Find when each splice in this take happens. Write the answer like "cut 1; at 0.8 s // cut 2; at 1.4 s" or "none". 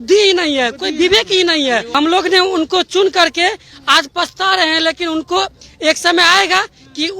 cut 1; at 1.9 s